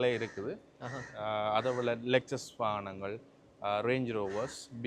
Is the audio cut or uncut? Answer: uncut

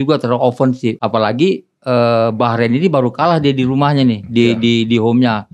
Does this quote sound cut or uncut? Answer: cut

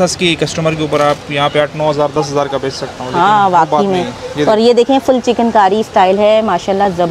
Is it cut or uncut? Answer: uncut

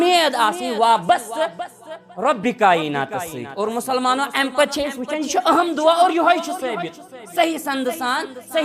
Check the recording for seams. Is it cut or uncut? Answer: uncut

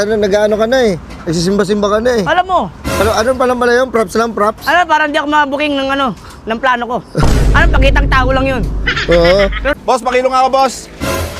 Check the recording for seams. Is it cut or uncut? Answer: cut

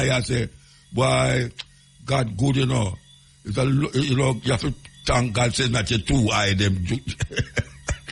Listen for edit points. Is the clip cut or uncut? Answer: uncut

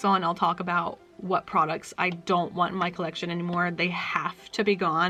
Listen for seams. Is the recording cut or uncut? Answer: uncut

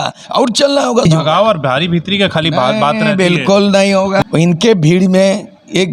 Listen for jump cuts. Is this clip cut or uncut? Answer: cut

